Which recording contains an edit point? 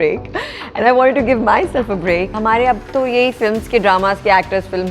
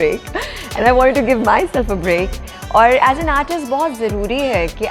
first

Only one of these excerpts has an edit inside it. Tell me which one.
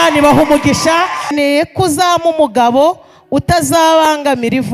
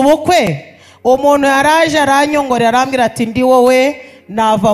first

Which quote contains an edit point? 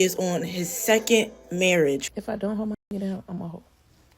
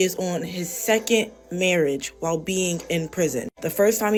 first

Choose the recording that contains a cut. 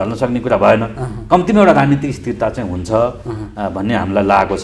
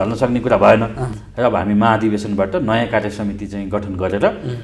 second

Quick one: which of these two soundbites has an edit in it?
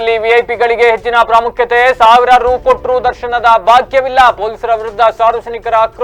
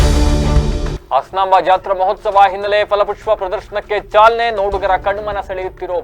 second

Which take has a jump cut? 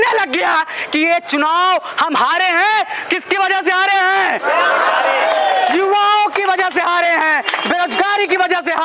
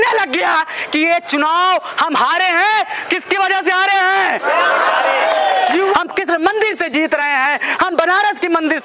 second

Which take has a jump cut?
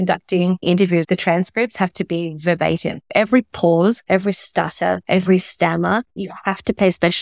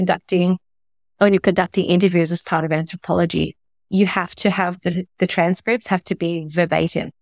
first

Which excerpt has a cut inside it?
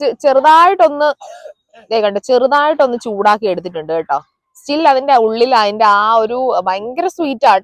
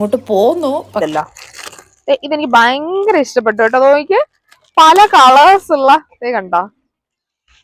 second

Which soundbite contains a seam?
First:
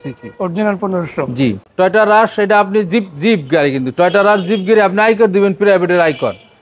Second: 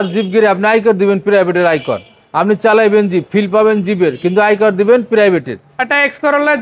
first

